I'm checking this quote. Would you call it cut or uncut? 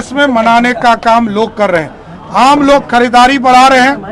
uncut